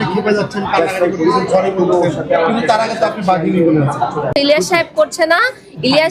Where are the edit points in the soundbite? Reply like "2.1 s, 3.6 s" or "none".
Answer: 4.4 s